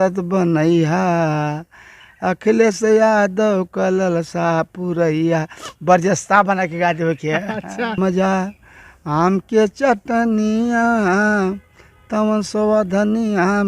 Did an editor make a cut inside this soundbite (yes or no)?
yes